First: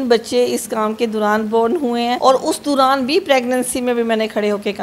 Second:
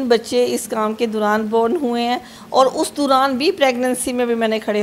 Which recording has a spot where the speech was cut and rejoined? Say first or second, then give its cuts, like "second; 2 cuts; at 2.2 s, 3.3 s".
first; 1 cut; at 2.2 s